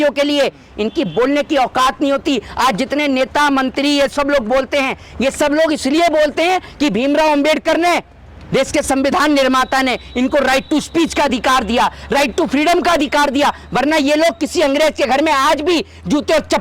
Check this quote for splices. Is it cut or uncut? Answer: uncut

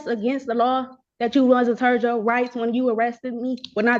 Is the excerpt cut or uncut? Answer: uncut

